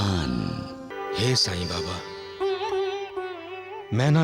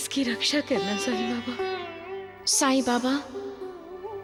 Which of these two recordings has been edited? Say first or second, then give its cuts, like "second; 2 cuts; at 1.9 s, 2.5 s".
first; 1 cut; at 0.9 s